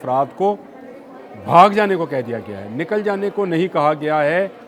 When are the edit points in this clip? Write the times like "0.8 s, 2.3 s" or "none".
none